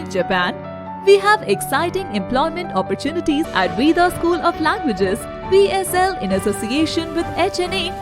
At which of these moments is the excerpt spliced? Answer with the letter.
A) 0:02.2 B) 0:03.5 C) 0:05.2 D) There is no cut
B